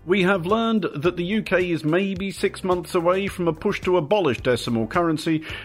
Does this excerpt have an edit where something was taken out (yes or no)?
yes